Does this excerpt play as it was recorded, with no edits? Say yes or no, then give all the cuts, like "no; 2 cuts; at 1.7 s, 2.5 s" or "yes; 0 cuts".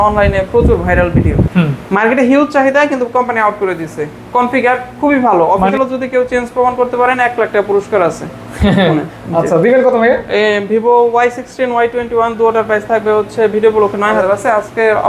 no; 3 cuts; at 1.5 s, 5.7 s, 14.2 s